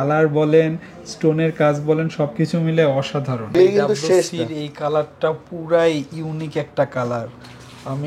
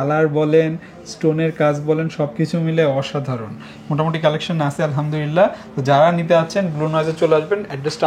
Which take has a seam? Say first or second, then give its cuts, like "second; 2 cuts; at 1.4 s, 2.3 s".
first; 1 cut; at 3.5 s